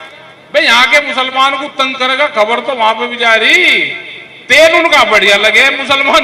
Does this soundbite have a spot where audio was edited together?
no; 0 cuts

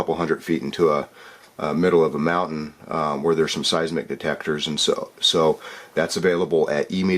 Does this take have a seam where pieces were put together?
yes; 1 cut; at 5.4 s

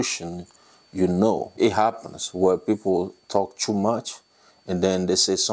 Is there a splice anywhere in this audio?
yes; 1 cut; at 1.6 s

